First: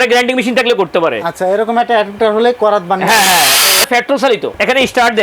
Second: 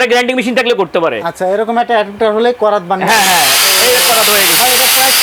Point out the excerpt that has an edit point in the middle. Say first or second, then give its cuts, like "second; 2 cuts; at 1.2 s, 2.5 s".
first; 1 cut; at 3.8 s